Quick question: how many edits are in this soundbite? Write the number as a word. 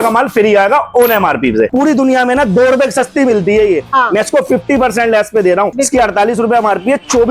two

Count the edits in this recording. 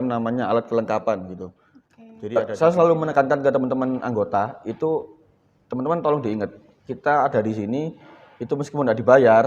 one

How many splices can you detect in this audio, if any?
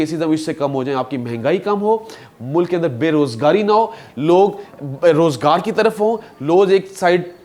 zero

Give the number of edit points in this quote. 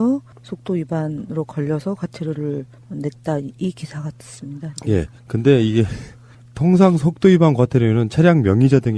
one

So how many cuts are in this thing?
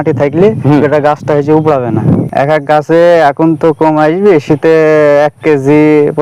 one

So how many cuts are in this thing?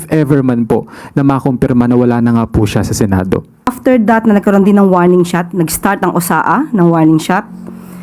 one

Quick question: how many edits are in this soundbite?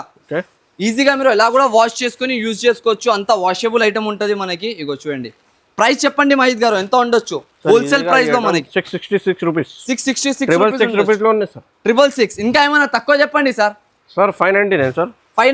zero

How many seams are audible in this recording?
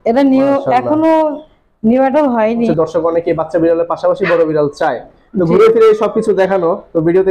one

